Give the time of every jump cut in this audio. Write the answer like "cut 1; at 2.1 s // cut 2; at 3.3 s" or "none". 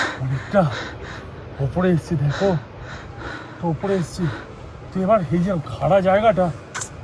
none